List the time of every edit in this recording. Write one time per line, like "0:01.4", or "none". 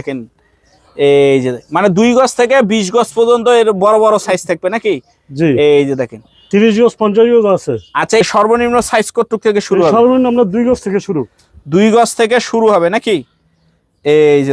0:08.2